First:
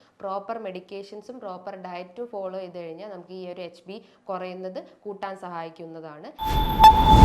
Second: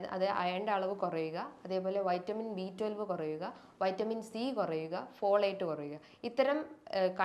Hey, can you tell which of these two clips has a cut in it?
first; 1 cut; at 6.3 s

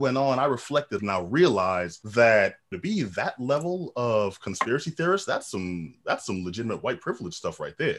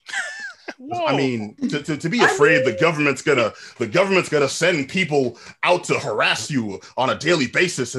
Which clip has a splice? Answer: first; 3 cuts; at 1.0 s, 2.0 s, 2.7 s

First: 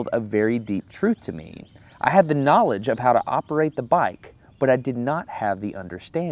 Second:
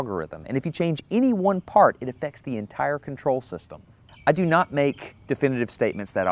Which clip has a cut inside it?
first; 1 cut; at 5.4 s

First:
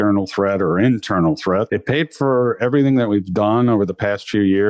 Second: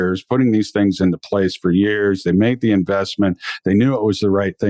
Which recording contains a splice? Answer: first; 1 cut; at 1.7 s

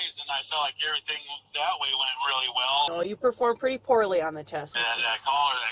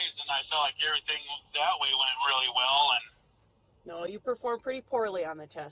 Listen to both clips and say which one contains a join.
first; 2 cuts; at 2.9 s, 4.6 s

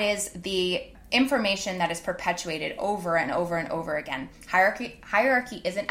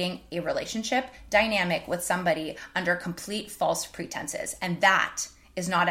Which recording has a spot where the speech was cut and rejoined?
first; 1 cut; at 1.0 s

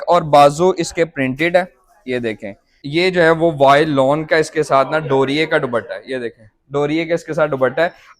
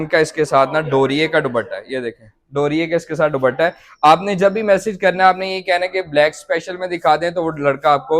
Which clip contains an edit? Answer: first; 1 cut; at 2.7 s

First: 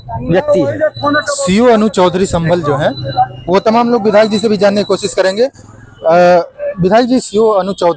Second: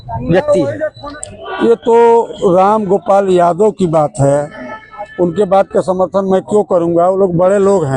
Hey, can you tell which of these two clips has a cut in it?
second; 1 cut; at 1.0 s

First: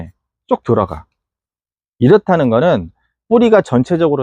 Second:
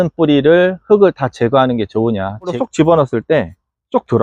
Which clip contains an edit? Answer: second; 1 cut; at 2.5 s

